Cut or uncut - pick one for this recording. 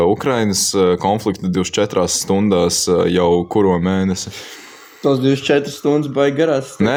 uncut